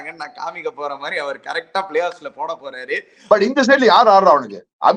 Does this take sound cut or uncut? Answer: cut